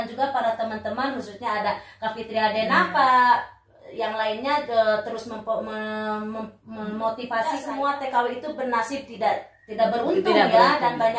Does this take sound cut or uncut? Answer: cut